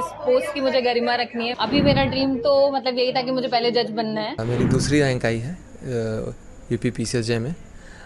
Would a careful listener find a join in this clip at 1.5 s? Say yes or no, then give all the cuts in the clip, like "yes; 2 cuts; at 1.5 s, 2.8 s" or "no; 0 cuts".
yes; 2 cuts; at 1.5 s, 4.4 s